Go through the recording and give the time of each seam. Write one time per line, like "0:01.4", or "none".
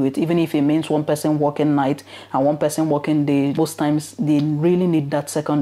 0:03.5